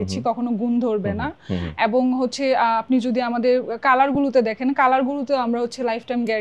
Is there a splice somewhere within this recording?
no; 0 cuts

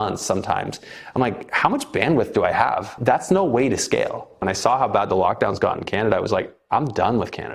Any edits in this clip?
yes; 2 cuts; at 2.9 s, 4.5 s

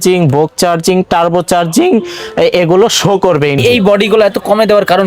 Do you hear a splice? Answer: yes; 1 cut; at 3.6 s

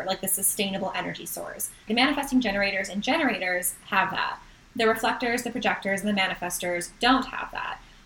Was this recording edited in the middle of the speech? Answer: yes; 1 cut; at 1.8 s

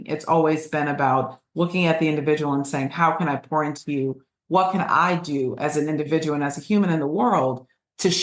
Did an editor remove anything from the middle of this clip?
no; 0 cuts

